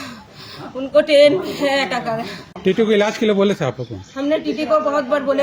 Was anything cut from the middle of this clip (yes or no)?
yes